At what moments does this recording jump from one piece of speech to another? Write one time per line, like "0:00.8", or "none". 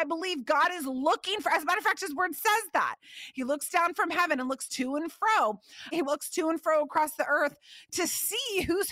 0:06.0